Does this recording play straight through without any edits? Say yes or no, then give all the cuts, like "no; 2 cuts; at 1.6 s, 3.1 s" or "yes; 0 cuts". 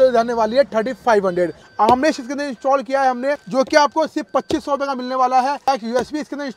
no; 3 cuts; at 1.6 s, 3.4 s, 5.7 s